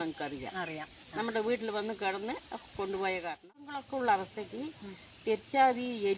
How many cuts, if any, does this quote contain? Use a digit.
1